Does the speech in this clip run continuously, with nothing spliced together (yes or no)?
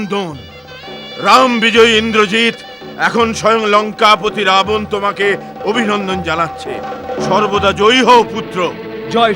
yes